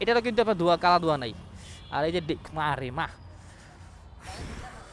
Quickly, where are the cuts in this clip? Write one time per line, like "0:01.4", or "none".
none